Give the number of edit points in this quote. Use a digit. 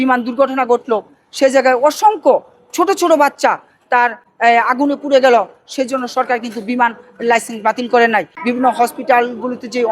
1